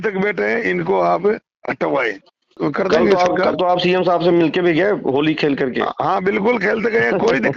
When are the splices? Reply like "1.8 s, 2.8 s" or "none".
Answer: 2.5 s